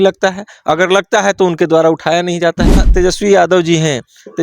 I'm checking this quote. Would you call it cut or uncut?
cut